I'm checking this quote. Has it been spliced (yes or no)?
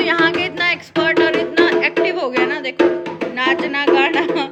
no